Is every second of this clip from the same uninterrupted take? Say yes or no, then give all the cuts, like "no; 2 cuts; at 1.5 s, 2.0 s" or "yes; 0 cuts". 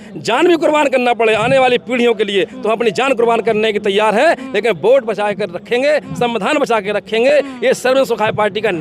yes; 0 cuts